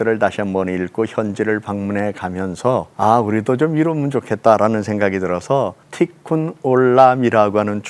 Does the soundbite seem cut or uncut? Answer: cut